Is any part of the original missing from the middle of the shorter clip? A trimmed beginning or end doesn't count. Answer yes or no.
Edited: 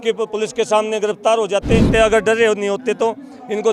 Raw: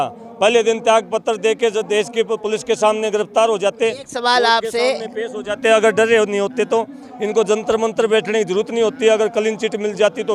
yes